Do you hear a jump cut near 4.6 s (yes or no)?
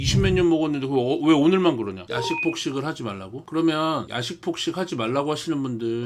no